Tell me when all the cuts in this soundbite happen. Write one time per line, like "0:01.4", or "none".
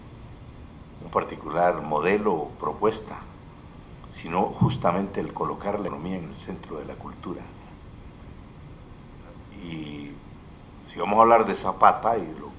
0:07.3